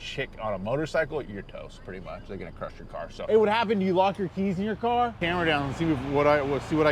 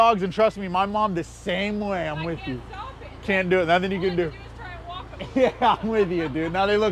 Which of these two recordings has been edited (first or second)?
first